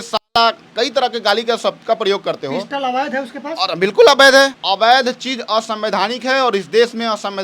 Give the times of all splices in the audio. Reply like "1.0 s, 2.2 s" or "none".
4.6 s